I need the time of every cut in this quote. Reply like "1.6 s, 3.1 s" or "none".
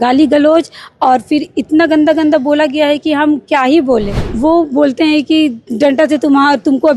4.2 s